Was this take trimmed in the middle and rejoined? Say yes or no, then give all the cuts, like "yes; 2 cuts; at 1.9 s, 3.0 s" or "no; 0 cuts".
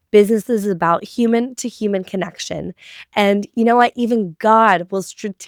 no; 0 cuts